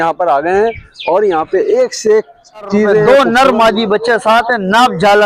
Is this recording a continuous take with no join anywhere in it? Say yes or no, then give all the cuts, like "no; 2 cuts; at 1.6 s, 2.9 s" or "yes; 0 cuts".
no; 1 cut; at 3.0 s